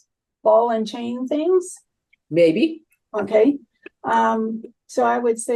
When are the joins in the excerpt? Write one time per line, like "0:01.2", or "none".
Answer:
none